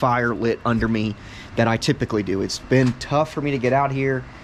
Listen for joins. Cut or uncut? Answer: uncut